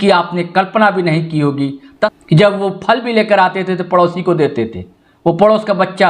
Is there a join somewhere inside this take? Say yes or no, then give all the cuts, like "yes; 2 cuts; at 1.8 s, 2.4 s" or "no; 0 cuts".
yes; 1 cut; at 2.1 s